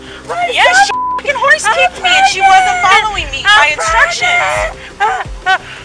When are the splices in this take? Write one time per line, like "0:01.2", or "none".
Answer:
none